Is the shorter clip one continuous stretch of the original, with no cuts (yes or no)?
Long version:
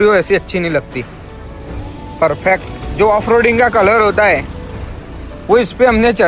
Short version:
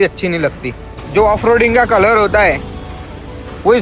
no